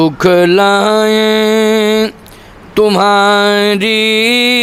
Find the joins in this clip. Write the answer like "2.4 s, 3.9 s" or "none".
none